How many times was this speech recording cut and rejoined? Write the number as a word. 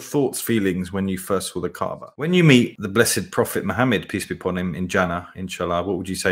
one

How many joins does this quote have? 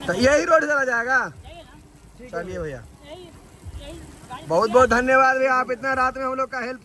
zero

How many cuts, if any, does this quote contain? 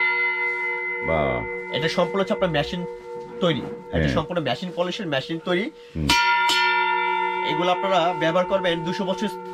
zero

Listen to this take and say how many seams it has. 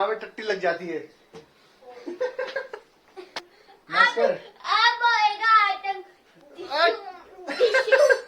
one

